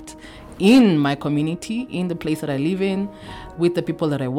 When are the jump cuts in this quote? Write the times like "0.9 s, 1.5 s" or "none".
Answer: none